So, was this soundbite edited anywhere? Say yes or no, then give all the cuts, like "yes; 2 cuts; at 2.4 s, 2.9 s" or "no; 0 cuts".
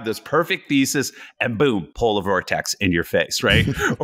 no; 0 cuts